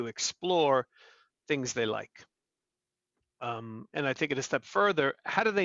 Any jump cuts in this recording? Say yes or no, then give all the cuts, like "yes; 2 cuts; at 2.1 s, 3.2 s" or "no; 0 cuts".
no; 0 cuts